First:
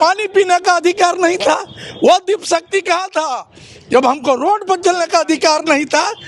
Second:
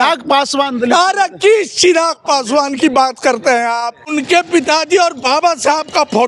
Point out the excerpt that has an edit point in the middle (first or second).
second